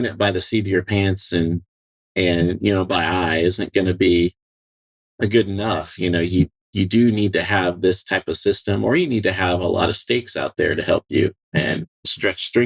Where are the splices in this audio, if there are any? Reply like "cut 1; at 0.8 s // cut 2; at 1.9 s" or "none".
none